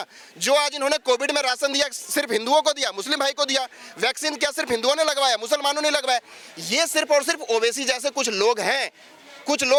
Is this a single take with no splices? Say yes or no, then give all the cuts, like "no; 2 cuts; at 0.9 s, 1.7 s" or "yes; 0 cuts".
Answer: yes; 0 cuts